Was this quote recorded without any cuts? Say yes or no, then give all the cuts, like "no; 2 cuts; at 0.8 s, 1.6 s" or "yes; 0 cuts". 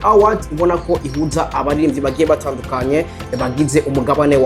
yes; 0 cuts